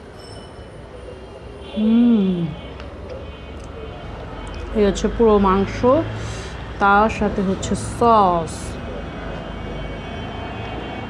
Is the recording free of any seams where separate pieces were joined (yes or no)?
yes